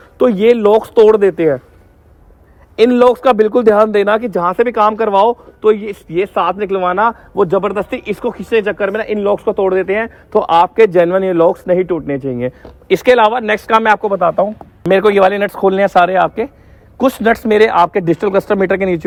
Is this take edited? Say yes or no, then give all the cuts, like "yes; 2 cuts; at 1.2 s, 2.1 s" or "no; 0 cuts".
no; 0 cuts